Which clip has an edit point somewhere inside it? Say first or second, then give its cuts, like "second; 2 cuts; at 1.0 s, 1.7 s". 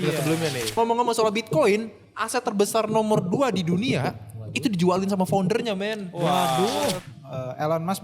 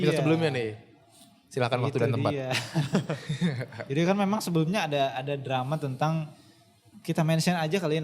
first; 2 cuts; at 0.7 s, 7.1 s